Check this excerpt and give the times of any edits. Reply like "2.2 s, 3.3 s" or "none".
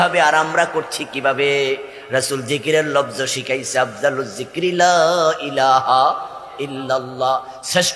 none